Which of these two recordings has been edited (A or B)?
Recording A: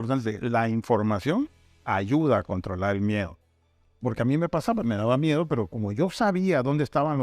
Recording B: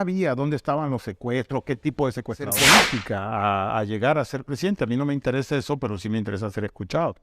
B